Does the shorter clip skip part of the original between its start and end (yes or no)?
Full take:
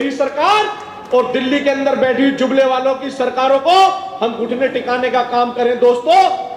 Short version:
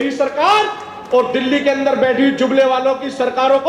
no